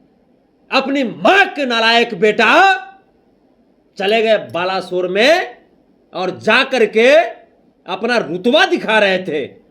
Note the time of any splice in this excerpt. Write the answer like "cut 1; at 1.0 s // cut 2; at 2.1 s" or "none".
none